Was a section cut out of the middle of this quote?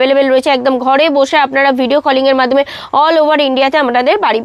no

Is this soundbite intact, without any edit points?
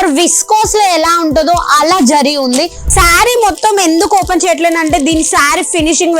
no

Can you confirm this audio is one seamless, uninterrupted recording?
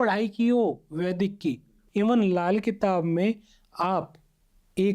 no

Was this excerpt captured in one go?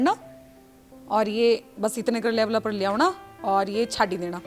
yes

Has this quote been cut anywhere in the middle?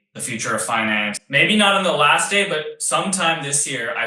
yes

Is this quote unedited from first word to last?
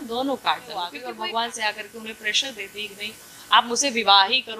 no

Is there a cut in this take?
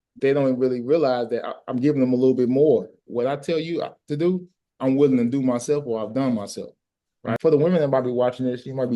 yes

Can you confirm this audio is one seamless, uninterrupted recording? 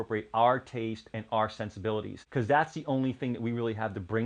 yes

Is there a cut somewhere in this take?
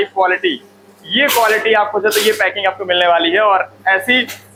no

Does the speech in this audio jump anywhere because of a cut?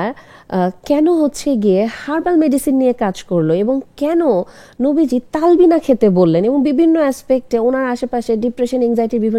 no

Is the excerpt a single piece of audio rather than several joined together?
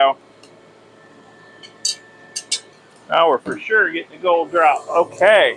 no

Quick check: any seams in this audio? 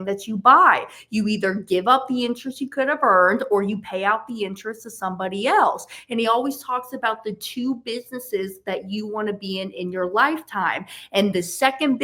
no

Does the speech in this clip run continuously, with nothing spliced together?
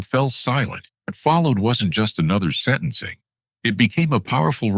no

